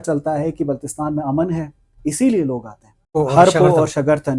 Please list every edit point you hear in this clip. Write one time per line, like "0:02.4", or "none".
0:03.1

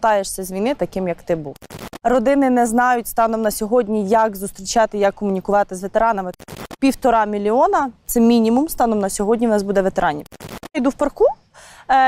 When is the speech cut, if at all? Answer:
0:01.6
0:06.5
0:10.7

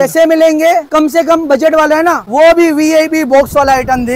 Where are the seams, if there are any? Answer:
0:00.9
0:02.2

